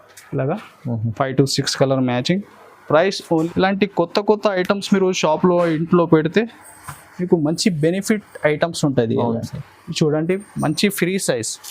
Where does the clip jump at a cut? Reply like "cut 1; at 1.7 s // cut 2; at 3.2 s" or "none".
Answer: cut 1; at 3.5 s